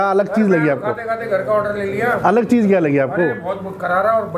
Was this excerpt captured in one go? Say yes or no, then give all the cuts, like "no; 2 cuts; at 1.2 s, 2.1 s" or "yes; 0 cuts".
yes; 0 cuts